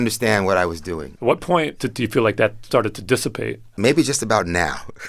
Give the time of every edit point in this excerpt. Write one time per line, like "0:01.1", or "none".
0:01.0
0:01.8
0:03.6